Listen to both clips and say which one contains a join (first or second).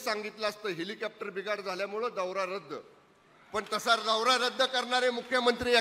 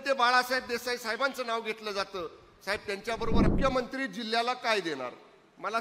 second